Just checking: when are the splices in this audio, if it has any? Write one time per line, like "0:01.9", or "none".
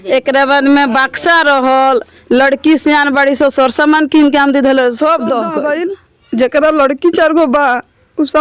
0:05.5